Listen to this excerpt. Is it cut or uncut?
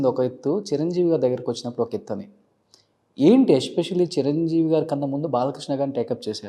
uncut